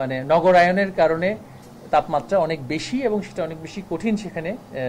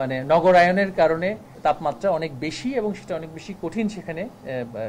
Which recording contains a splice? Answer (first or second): second